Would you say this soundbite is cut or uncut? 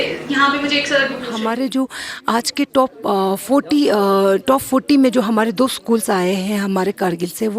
cut